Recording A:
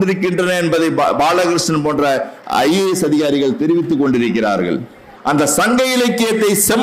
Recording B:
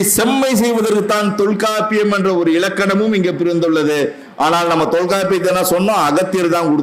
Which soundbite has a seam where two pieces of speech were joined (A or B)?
A